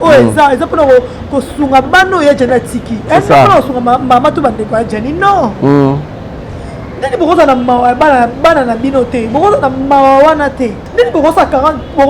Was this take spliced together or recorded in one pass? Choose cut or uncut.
cut